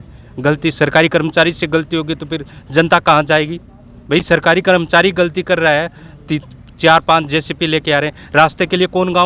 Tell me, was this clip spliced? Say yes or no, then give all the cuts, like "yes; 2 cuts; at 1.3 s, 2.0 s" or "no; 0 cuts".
no; 0 cuts